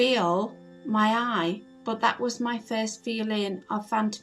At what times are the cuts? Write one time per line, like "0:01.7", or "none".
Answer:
0:01.7

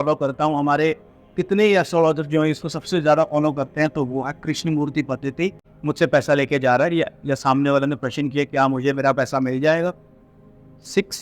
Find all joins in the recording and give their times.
0:05.7

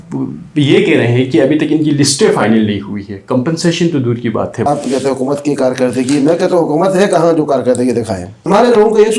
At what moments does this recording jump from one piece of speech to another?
0:04.7
0:08.4

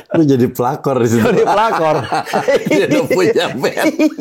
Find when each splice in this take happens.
none

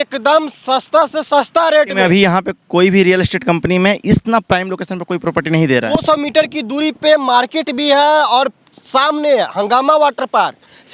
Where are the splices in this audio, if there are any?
0:01.9
0:05.9

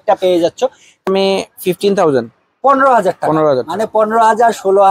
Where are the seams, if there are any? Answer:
0:01.1

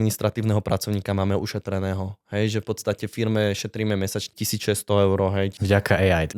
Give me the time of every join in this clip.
0:04.3
0:05.6

